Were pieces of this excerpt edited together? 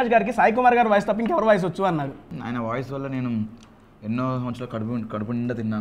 yes; 1 cut; at 2.3 s

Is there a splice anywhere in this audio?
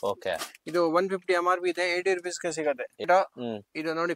yes; 1 cut; at 3.0 s

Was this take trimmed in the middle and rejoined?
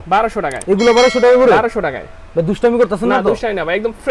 no; 0 cuts

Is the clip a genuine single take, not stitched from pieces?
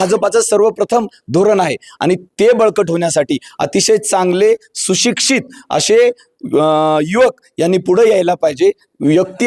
yes; 0 cuts

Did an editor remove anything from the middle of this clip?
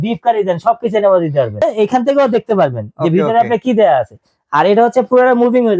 yes; 1 cut; at 1.6 s

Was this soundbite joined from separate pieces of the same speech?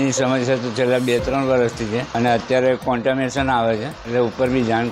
yes; 2 cuts; at 2.1 s, 3.9 s

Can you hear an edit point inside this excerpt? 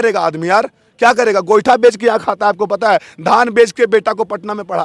no; 0 cuts

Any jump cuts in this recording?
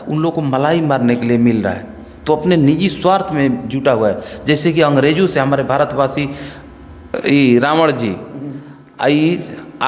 yes; 1 cut; at 7.1 s

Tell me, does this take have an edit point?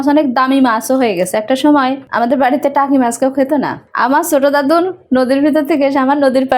yes; 2 cuts; at 2.1 s, 3.8 s

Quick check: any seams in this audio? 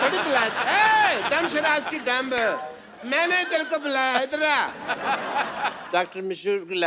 yes; 1 cut; at 5.8 s

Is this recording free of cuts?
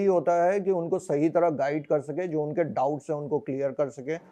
yes; 0 cuts

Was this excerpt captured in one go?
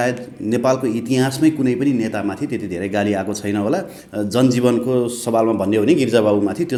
yes; 0 cuts

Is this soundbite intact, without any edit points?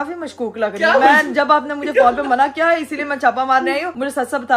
yes; 0 cuts

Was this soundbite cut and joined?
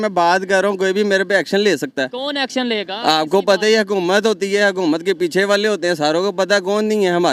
no; 0 cuts

